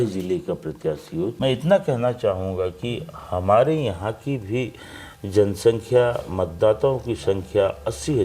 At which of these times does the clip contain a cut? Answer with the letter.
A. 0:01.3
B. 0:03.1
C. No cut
A